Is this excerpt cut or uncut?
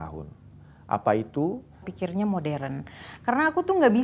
cut